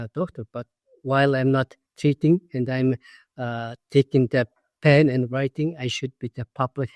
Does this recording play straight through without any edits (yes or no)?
yes